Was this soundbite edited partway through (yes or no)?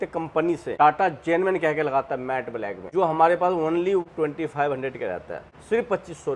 yes